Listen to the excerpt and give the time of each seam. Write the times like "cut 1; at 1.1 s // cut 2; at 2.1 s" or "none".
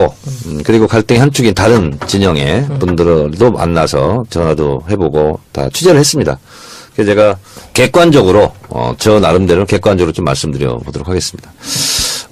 cut 1; at 9.7 s